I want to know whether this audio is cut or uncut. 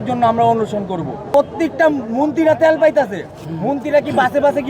cut